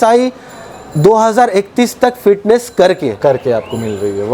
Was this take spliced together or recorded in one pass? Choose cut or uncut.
uncut